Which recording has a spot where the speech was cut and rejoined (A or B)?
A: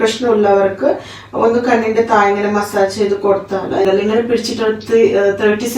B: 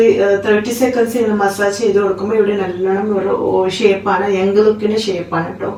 A